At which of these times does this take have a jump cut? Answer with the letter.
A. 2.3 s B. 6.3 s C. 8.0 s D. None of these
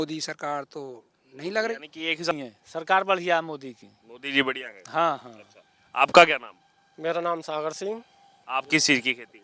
A